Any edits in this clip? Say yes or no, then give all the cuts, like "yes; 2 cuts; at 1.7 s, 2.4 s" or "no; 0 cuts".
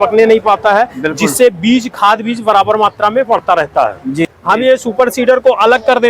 yes; 1 cut; at 4.3 s